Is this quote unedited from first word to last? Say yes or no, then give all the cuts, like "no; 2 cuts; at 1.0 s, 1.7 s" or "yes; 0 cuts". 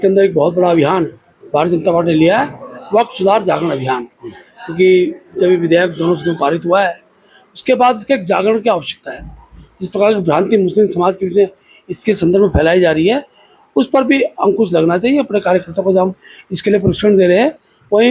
yes; 0 cuts